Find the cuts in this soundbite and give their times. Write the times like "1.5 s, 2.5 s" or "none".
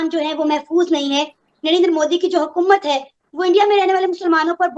none